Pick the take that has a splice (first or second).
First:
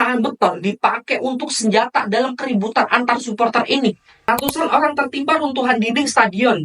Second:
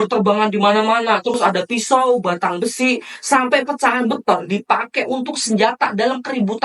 first